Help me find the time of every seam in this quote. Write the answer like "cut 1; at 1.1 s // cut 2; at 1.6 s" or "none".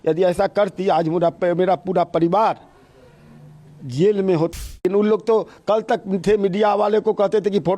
cut 1; at 4.5 s